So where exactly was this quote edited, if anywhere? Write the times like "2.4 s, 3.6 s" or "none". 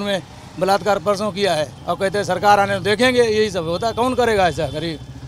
1.8 s